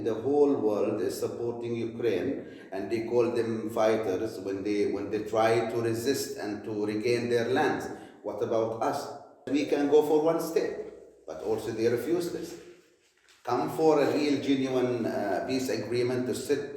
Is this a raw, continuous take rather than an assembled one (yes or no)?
no